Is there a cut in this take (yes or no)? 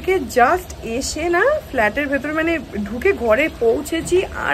no